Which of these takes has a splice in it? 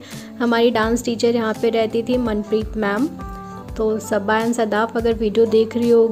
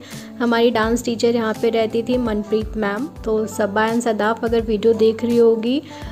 second; 1 cut; at 3.1 s

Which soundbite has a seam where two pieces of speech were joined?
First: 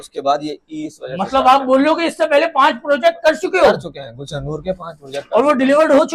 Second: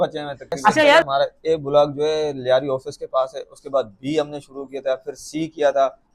second; 1 cut; at 1.0 s

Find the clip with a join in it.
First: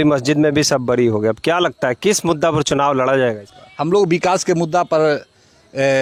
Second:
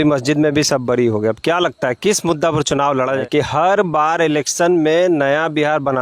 second; 1 cut; at 3.2 s

